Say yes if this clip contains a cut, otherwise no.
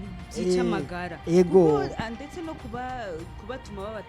no